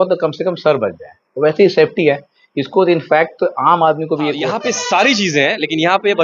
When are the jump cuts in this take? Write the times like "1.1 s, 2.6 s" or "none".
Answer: 4.5 s